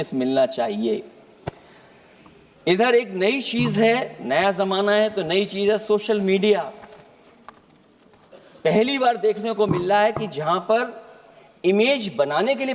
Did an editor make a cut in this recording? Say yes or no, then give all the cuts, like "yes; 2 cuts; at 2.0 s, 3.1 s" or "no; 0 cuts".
no; 0 cuts